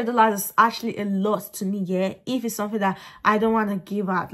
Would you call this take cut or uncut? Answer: uncut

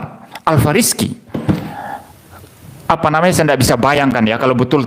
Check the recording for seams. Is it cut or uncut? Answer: cut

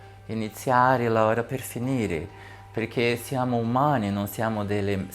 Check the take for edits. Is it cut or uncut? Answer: uncut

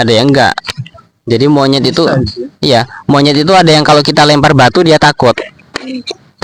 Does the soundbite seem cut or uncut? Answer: uncut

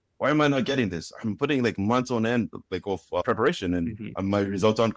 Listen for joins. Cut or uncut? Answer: cut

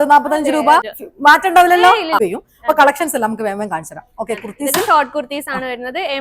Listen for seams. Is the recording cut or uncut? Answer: cut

